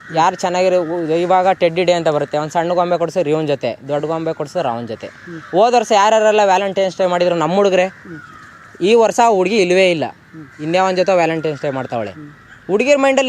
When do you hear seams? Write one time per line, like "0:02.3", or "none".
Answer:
none